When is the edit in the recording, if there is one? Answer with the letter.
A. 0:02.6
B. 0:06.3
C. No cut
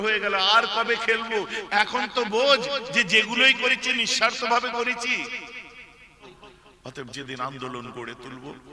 B